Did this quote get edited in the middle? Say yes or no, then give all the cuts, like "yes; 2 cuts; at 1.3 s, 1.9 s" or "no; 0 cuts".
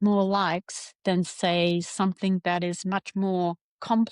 no; 0 cuts